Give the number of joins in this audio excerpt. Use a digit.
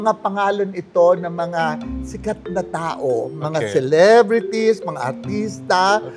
0